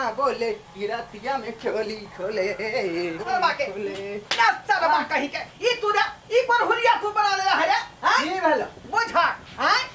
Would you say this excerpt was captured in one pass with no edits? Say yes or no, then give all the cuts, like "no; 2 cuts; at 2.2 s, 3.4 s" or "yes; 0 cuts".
no; 1 cut; at 3.3 s